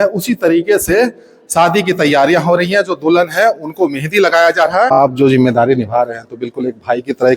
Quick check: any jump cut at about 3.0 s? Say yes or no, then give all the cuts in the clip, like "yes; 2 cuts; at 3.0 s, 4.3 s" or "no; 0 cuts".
no; 1 cut; at 5.0 s